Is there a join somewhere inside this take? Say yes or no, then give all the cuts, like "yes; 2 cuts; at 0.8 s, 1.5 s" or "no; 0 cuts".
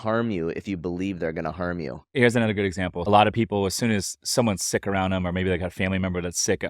yes; 2 cuts; at 2.1 s, 3.1 s